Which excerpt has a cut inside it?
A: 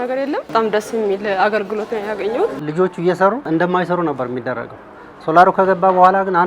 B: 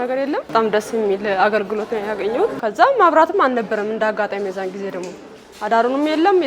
A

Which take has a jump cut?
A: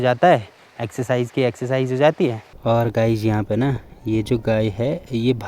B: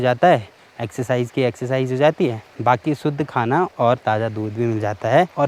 A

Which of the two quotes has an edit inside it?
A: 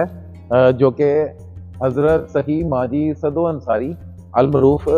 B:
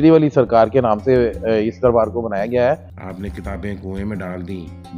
B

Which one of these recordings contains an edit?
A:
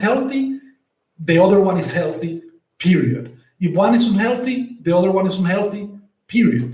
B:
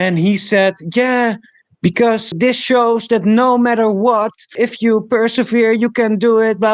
B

